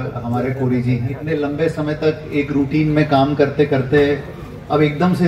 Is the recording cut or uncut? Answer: cut